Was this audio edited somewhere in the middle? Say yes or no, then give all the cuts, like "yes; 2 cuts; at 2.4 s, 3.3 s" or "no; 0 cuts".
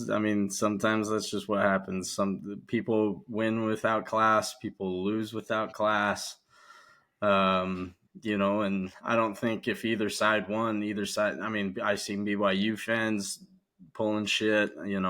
no; 0 cuts